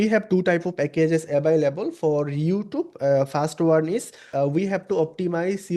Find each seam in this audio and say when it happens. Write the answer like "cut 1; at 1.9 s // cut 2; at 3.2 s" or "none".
cut 1; at 4.2 s